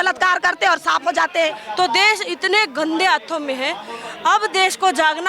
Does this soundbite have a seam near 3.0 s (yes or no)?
no